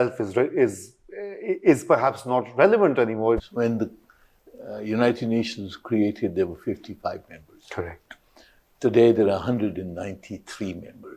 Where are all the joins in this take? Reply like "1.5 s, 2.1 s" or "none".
3.4 s